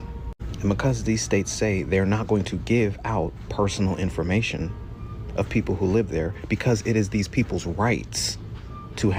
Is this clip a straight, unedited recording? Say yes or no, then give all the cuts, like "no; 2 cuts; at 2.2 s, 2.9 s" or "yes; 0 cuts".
yes; 0 cuts